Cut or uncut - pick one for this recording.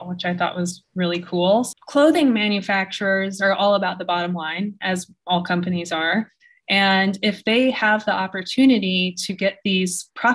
cut